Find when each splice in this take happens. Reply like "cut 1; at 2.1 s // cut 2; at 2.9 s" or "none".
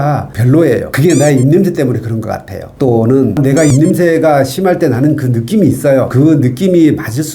cut 1; at 6.1 s